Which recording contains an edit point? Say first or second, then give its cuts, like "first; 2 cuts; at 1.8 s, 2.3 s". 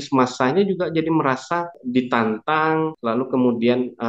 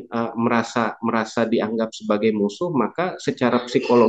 first; 2 cuts; at 1.8 s, 3.0 s